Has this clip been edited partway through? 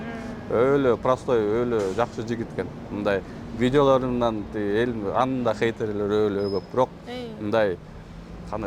no; 0 cuts

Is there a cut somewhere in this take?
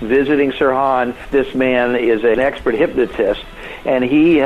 yes; 2 cuts; at 1.2 s, 2.4 s

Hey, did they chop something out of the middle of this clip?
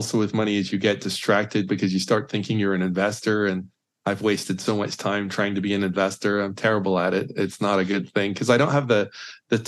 no; 0 cuts

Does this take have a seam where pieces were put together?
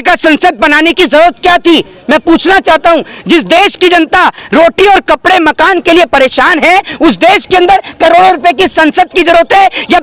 no; 0 cuts

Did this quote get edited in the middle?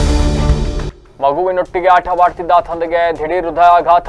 yes; 1 cut; at 0.9 s

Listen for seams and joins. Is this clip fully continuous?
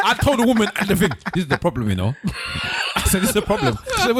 yes; 0 cuts

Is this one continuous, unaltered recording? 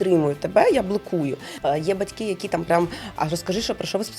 no; 1 cut; at 1.5 s

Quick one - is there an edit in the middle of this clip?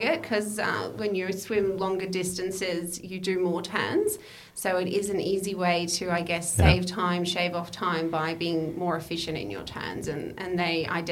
no; 0 cuts

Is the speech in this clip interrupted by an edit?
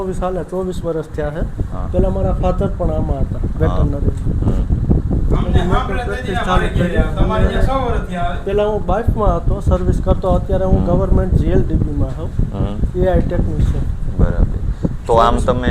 no; 0 cuts

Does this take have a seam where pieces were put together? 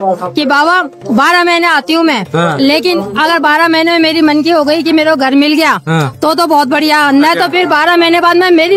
no; 0 cuts

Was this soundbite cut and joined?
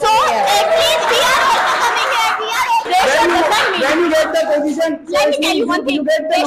yes; 1 cut; at 2.9 s

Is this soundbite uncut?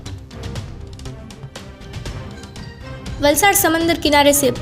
yes; 0 cuts

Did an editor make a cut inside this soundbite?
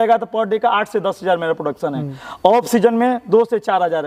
no; 0 cuts

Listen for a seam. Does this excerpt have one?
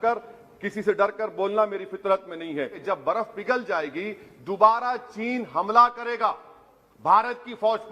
yes; 1 cut; at 2.8 s

